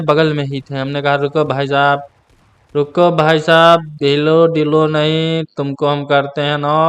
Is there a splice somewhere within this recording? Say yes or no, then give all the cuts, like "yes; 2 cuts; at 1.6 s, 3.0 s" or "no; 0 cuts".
yes; 1 cut; at 4.4 s